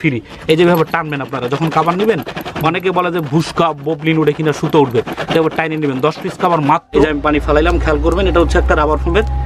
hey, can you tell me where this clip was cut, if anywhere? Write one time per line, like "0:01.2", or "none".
0:06.9